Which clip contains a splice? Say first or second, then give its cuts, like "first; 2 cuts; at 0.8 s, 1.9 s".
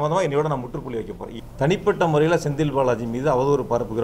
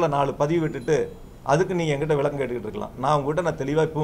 first; 1 cut; at 1.2 s